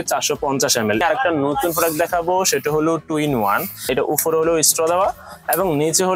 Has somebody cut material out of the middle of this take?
yes; 2 cuts; at 1.0 s, 3.9 s

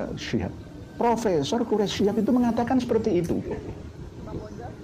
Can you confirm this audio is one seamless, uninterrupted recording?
yes; 0 cuts

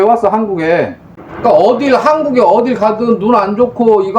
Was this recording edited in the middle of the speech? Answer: yes; 1 cut; at 1.0 s

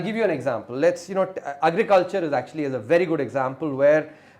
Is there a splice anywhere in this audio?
no; 0 cuts

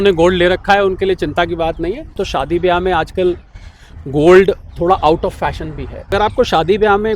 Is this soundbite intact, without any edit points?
no; 2 cuts; at 2.2 s, 6.1 s

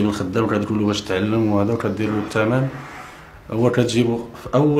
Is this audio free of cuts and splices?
yes; 0 cuts

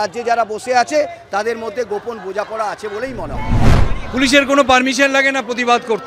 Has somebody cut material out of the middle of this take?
yes; 1 cut; at 3.7 s

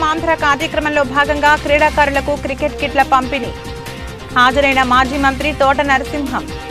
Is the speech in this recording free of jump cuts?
yes; 0 cuts

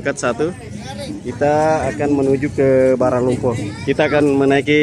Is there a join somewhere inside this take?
yes; 1 cut; at 1.1 s

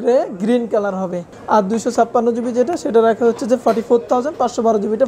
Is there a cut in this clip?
yes; 1 cut; at 1.3 s

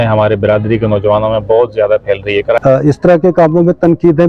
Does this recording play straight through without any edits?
no; 1 cut; at 2.6 s

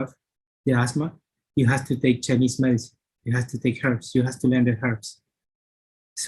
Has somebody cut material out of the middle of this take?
no; 0 cuts

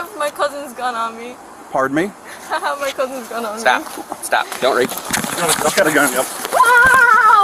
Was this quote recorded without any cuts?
yes; 0 cuts

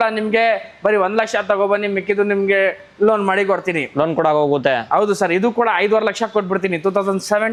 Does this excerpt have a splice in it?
no; 0 cuts

